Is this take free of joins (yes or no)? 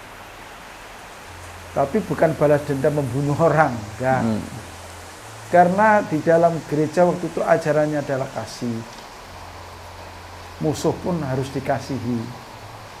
yes